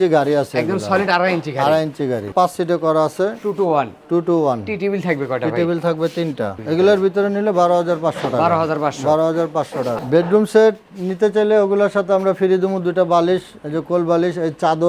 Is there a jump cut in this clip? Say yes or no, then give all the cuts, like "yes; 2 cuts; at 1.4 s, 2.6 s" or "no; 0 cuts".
yes; 3 cuts; at 2.3 s, 6.6 s, 10.0 s